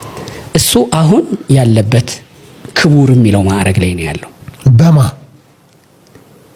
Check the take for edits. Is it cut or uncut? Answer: uncut